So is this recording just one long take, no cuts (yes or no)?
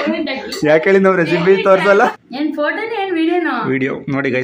no